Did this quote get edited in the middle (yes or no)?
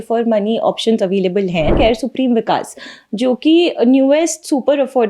yes